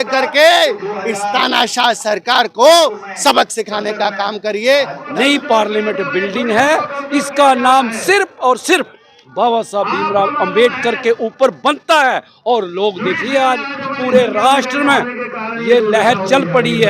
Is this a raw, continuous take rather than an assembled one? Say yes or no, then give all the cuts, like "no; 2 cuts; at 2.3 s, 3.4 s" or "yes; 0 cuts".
no; 1 cut; at 5.0 s